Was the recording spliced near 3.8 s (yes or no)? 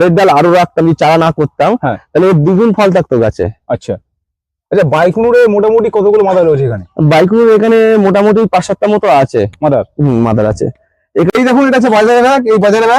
no